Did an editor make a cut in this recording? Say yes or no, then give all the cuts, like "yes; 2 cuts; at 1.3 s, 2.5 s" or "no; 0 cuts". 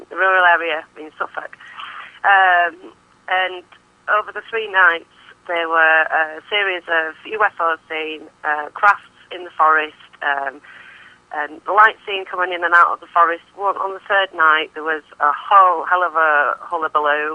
yes; 1 cut; at 6.4 s